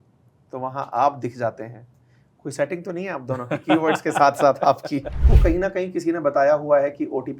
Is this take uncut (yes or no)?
no